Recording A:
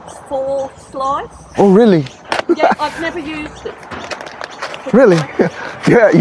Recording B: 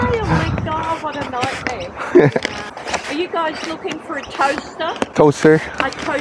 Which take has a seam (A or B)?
B